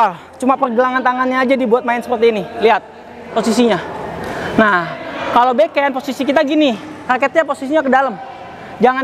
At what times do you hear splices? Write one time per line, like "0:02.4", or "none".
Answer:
none